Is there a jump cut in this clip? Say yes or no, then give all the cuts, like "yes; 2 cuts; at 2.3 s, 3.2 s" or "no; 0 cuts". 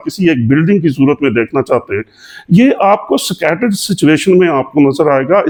no; 0 cuts